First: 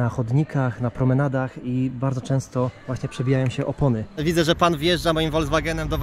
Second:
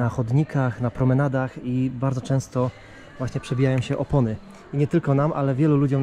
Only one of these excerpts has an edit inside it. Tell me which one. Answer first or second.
first